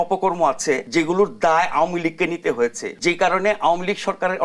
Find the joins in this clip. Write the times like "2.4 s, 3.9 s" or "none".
0.8 s, 2.9 s